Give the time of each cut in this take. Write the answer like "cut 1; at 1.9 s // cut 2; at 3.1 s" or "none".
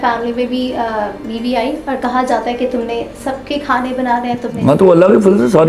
none